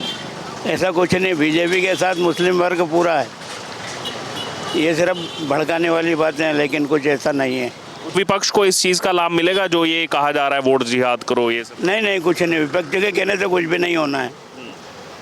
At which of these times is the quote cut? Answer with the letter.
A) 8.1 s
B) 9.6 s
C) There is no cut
A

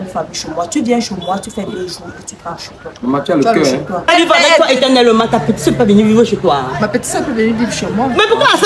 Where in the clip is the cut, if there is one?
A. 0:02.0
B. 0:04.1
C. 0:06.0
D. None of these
B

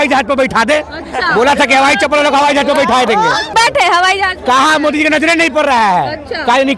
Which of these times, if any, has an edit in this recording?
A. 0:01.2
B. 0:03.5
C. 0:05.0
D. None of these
B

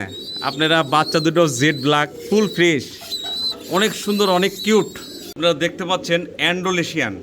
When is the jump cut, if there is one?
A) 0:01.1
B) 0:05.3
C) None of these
B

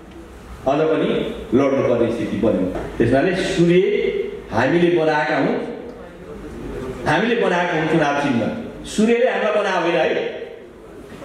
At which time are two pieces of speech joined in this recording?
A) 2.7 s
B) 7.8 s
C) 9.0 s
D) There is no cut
A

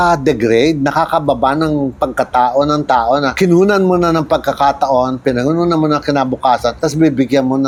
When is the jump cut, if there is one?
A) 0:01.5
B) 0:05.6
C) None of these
C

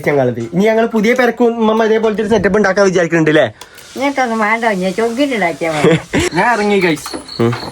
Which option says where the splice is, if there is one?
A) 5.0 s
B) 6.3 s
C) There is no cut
B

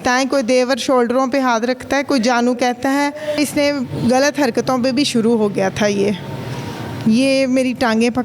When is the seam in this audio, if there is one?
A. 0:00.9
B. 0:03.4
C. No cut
B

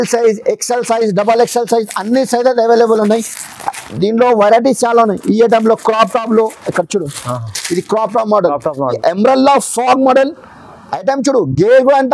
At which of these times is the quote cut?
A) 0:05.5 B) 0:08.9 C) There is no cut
B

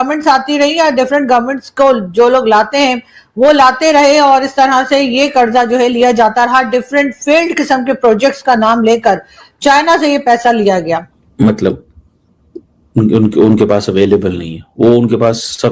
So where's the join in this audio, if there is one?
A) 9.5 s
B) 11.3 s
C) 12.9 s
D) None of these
B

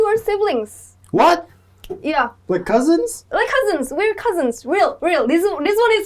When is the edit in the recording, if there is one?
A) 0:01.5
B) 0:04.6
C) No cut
A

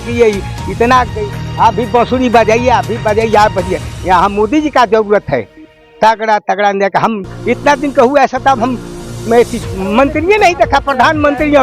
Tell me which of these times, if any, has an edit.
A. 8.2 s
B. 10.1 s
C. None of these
B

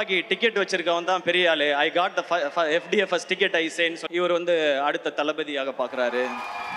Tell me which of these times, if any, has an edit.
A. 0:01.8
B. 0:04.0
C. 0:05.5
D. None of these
B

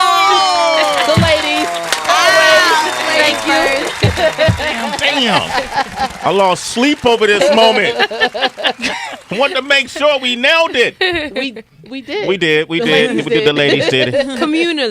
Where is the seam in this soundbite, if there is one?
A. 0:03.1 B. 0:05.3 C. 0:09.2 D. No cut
A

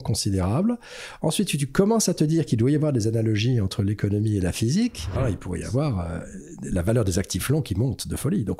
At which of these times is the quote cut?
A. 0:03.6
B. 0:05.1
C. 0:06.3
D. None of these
B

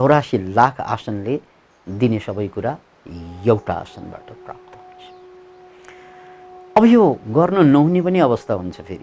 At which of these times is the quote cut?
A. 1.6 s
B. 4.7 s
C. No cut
C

